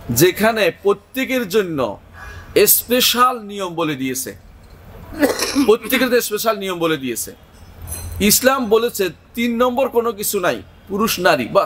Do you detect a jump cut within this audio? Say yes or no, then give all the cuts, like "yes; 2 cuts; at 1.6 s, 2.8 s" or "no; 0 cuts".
no; 0 cuts